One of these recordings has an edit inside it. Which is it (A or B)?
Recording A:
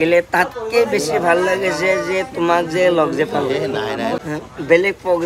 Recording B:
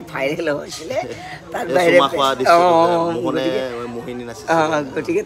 A